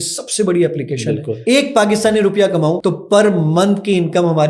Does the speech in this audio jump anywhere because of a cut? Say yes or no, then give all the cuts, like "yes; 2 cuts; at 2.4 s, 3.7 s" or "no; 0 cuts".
yes; 2 cuts; at 1.3 s, 2.8 s